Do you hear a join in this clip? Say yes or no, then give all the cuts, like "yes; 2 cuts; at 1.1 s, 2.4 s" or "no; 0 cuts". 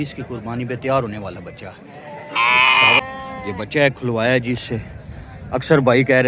yes; 1 cut; at 3.0 s